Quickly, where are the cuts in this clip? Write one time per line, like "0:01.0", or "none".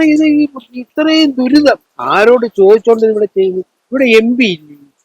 0:01.9